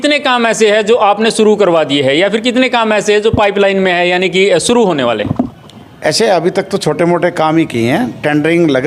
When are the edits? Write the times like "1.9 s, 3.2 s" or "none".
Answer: none